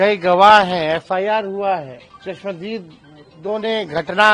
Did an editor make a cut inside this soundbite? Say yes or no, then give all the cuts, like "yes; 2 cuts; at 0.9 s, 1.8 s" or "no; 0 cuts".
yes; 1 cut; at 2.1 s